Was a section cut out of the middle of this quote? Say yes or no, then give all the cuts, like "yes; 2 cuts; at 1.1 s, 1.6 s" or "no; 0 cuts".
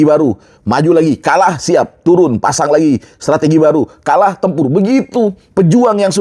no; 0 cuts